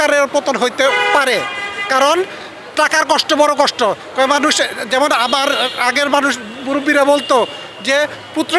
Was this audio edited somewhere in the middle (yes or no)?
no